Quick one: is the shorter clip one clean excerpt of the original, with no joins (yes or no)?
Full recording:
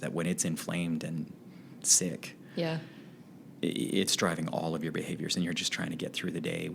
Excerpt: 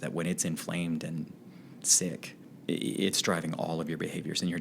no